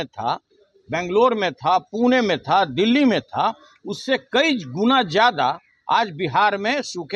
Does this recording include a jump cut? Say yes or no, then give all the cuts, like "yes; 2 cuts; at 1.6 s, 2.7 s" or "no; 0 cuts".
no; 0 cuts